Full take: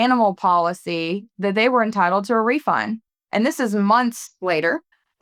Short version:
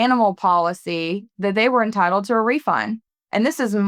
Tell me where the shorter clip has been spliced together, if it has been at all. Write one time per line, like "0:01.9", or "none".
none